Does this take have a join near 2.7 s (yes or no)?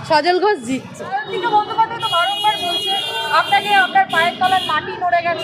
no